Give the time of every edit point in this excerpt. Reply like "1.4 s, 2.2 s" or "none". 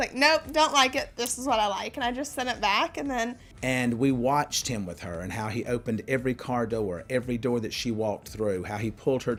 none